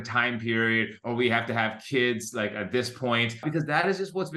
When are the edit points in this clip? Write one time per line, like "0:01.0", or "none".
0:03.4